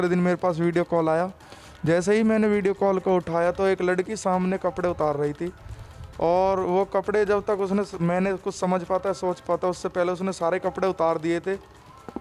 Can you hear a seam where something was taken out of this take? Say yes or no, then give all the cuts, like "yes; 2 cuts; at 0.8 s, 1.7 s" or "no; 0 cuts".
no; 0 cuts